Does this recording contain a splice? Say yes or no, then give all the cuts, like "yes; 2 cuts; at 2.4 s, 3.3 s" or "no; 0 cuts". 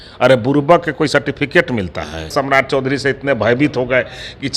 yes; 1 cut; at 2.3 s